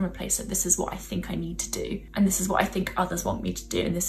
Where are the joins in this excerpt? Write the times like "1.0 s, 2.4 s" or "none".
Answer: 2.1 s